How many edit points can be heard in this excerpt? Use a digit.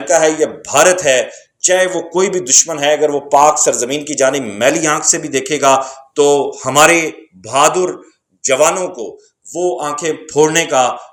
0